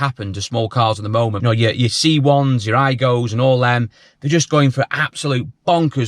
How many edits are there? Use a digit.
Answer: 1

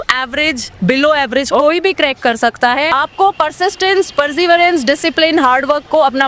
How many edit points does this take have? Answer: 1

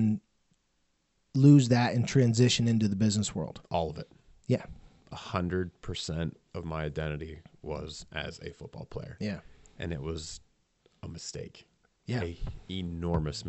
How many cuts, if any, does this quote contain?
0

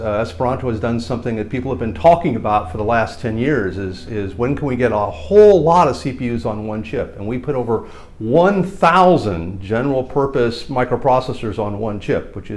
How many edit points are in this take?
0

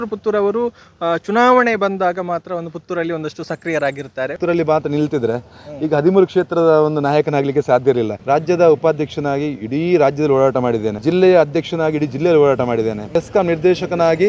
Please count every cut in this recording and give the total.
4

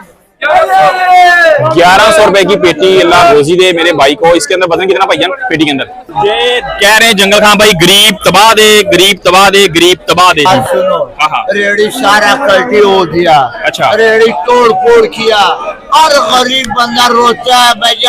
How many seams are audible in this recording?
2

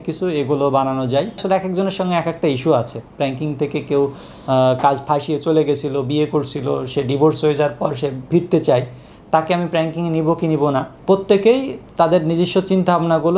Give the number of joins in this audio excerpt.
2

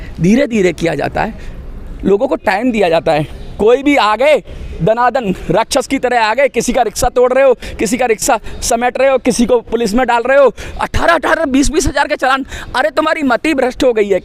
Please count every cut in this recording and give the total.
0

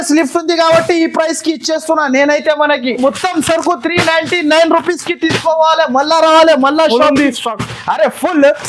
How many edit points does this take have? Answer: 1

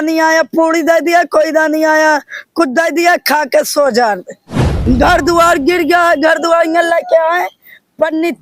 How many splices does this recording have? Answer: 1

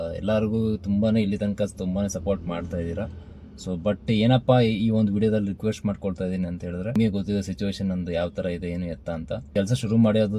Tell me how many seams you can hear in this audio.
2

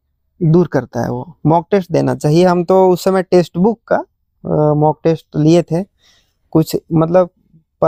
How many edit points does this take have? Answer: 0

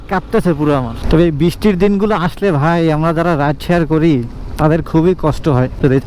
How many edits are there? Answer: 0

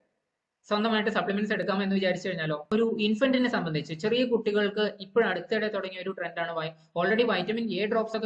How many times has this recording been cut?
1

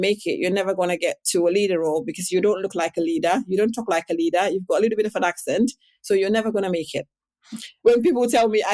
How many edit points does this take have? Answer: 1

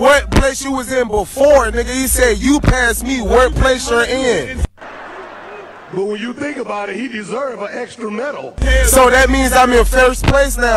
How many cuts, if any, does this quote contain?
2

